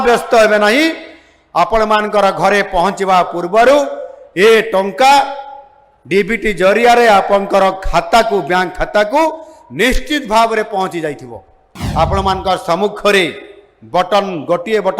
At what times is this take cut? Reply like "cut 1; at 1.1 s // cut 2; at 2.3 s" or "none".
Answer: cut 1; at 11.7 s